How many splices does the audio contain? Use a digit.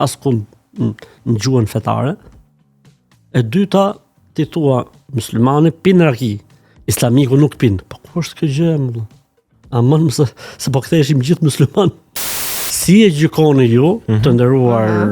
1